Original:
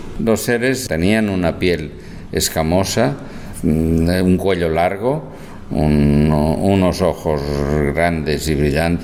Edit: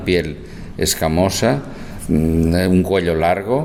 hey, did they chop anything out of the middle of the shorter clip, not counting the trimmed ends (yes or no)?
no